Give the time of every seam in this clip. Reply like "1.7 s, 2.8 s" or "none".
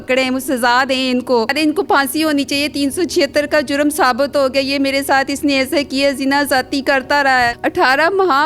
1.5 s, 7.6 s